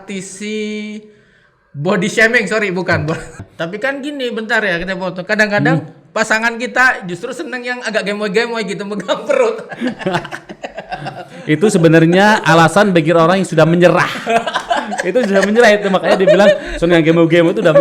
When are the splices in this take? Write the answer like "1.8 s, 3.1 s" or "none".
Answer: 3.4 s